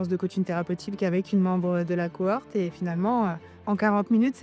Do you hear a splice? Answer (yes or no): no